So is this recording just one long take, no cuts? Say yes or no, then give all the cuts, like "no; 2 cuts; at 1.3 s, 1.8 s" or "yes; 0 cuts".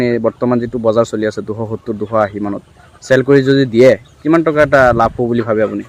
yes; 0 cuts